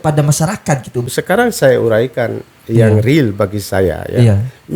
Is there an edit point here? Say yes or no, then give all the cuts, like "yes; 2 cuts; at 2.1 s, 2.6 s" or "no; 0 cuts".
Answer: yes; 1 cut; at 1.1 s